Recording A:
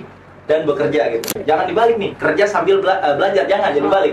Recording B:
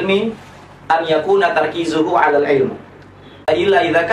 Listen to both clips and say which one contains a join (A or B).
A